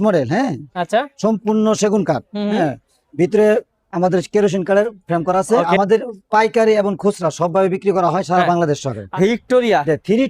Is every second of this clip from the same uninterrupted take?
no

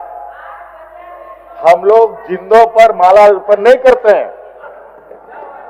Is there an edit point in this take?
no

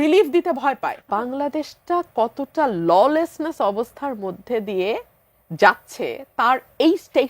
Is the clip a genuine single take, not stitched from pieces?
no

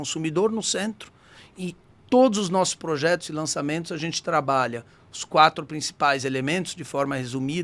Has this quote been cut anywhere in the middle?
no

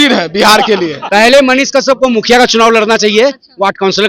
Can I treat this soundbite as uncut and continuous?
no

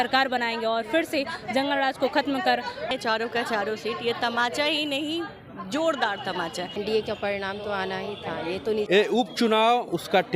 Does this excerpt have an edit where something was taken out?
yes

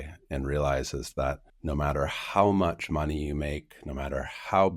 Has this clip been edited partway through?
yes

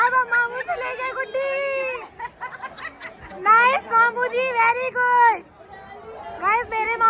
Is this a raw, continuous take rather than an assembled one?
yes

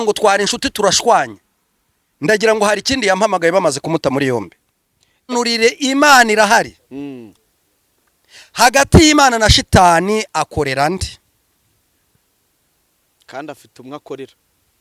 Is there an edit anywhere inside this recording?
yes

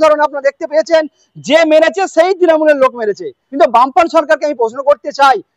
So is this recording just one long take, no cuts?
no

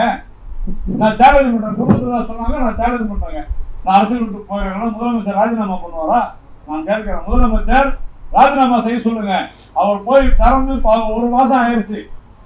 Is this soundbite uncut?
yes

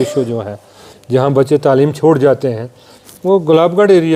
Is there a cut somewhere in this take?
no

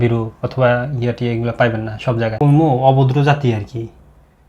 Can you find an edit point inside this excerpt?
yes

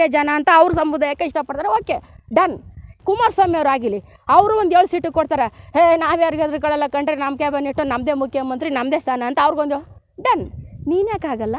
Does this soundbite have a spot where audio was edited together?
yes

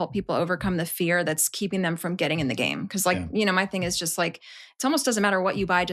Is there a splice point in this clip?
no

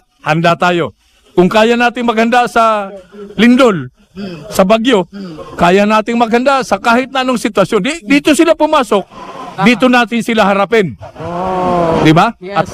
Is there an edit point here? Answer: no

